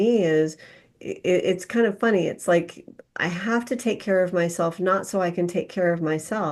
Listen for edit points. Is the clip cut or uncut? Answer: uncut